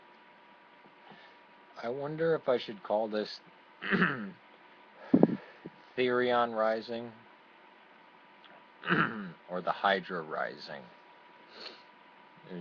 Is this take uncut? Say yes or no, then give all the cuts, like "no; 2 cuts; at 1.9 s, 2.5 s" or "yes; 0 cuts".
yes; 0 cuts